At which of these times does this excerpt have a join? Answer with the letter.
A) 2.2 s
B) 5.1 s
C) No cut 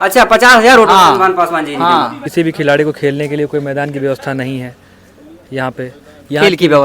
A